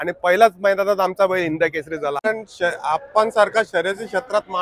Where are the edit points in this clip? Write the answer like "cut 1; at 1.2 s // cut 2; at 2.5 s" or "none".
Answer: cut 1; at 2.2 s